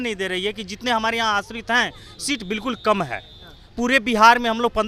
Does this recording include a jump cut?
no; 0 cuts

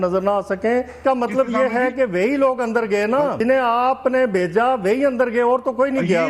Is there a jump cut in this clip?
yes; 2 cuts; at 1.0 s, 3.4 s

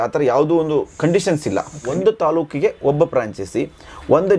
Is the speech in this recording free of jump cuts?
no; 1 cut; at 1.9 s

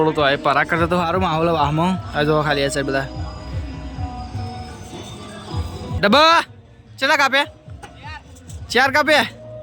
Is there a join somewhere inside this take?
yes; 1 cut; at 5.9 s

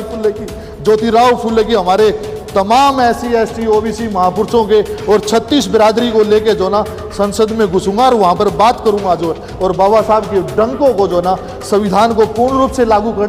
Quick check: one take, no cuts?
yes; 0 cuts

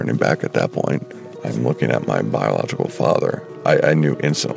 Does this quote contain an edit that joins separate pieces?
yes; 2 cuts; at 1.1 s, 3.5 s

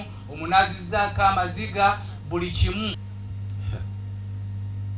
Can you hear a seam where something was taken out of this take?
yes; 1 cut; at 3.0 s

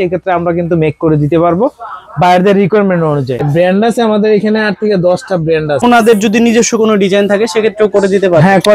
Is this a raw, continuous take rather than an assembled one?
no; 2 cuts; at 3.4 s, 5.8 s

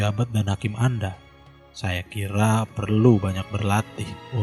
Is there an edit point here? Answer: no; 0 cuts

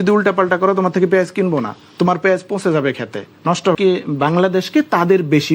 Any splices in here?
yes; 1 cut; at 3.7 s

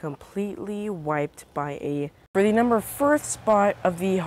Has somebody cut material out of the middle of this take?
yes; 1 cut; at 2.3 s

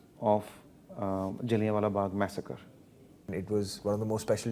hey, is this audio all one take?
no; 1 cut; at 3.3 s

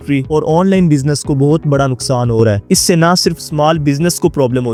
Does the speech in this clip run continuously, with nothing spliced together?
yes; 0 cuts

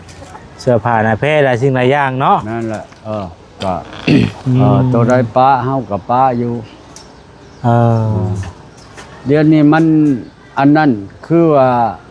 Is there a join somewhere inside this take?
no; 0 cuts

